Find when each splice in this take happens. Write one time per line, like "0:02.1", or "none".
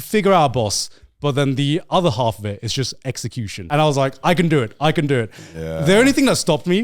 0:03.6